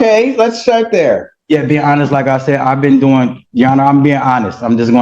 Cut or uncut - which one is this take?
uncut